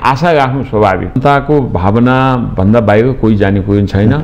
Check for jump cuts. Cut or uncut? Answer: cut